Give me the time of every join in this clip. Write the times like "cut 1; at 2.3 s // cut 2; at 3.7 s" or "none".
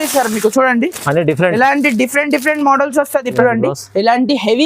cut 1; at 3.4 s